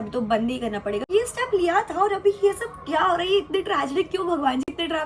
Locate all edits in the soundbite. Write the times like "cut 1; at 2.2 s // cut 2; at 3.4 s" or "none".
cut 1; at 1.1 s